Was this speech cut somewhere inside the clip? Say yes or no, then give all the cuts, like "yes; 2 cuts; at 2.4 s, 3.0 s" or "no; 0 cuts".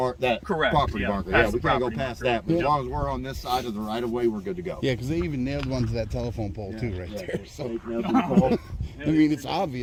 no; 0 cuts